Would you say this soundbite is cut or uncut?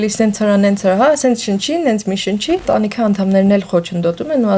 cut